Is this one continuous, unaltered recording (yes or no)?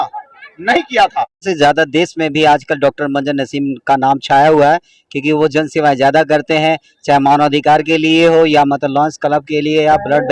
no